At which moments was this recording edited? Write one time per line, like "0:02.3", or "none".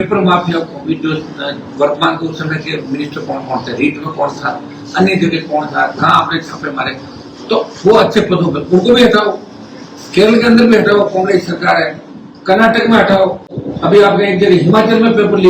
none